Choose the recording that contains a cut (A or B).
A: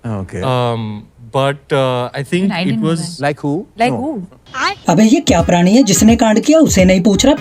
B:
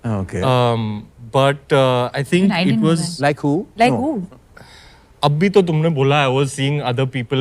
B